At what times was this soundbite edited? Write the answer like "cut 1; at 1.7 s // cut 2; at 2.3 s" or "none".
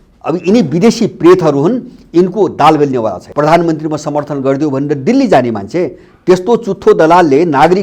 cut 1; at 3.2 s